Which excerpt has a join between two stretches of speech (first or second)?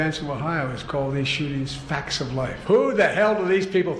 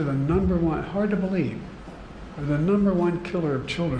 first